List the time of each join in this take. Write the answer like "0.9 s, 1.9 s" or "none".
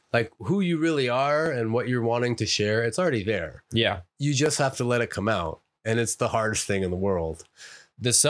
none